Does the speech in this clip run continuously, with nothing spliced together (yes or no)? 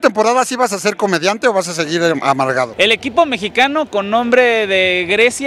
no